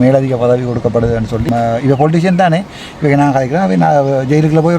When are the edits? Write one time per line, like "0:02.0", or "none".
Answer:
0:01.4